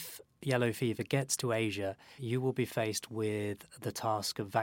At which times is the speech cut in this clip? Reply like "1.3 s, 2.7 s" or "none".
2.1 s